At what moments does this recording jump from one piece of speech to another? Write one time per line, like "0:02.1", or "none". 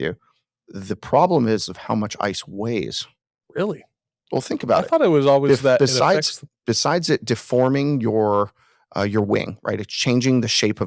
none